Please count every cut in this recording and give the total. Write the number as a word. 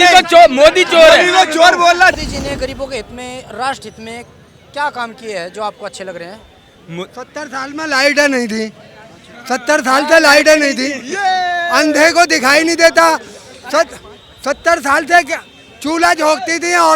one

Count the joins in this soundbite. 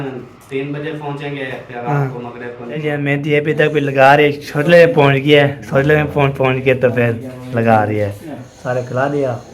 two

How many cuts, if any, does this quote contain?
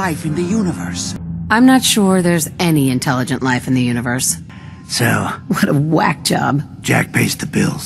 three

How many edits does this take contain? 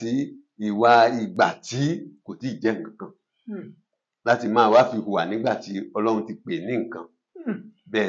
zero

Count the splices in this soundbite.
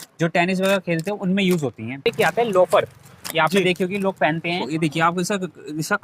two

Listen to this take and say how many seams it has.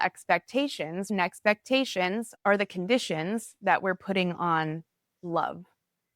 one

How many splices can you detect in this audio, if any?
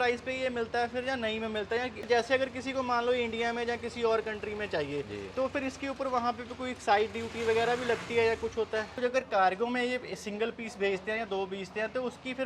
two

